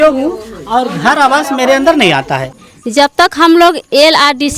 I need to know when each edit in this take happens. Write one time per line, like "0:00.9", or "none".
0:02.5